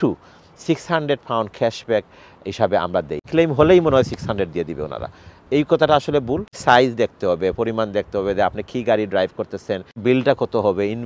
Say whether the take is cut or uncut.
cut